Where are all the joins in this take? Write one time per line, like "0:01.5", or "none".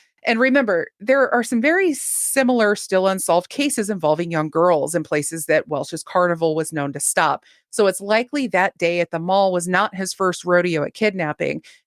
none